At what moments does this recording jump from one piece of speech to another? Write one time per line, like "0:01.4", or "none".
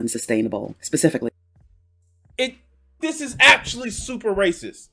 0:03.0